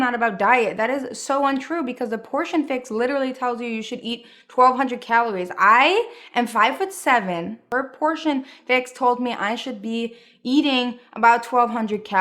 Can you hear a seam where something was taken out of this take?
yes; 1 cut; at 7.6 s

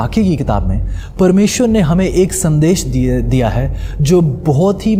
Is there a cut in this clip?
no; 0 cuts

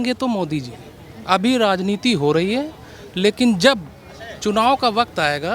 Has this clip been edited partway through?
no; 0 cuts

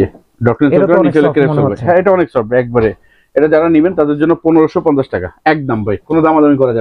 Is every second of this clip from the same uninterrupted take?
yes; 0 cuts

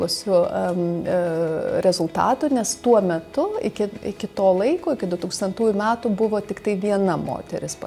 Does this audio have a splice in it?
no; 0 cuts

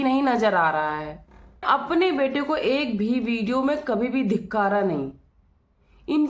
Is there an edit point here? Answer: yes; 1 cut; at 1.6 s

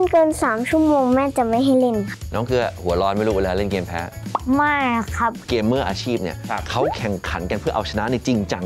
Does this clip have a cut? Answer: yes; 2 cuts; at 2.2 s, 5.4 s

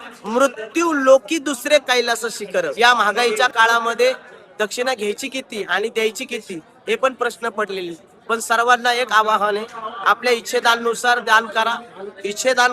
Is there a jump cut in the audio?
yes; 1 cut; at 2.7 s

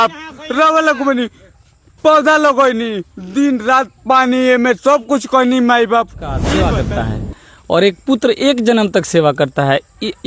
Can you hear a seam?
yes; 1 cut; at 6.5 s

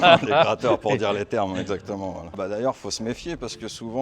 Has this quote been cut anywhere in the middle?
yes; 1 cut; at 2.3 s

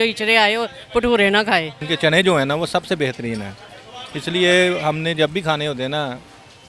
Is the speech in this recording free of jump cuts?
no; 1 cut; at 1.9 s

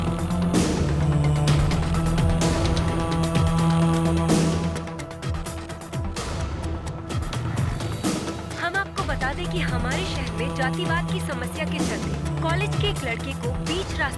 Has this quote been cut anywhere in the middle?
no; 0 cuts

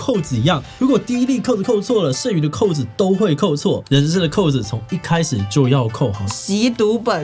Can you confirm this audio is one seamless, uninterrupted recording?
no; 1 cut; at 6.3 s

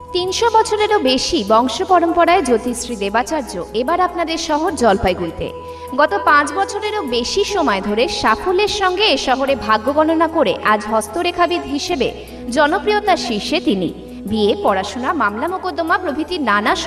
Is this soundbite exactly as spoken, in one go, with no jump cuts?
yes; 0 cuts

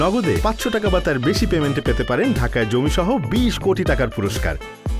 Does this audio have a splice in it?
no; 0 cuts

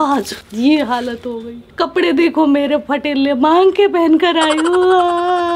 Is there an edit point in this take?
no; 0 cuts

